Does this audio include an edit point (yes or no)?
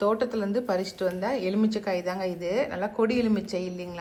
no